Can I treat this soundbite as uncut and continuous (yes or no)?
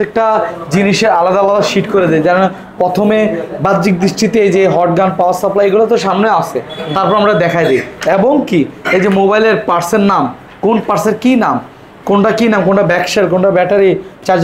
yes